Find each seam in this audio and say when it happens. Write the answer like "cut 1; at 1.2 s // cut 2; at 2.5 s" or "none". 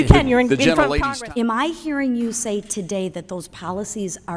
cut 1; at 1.0 s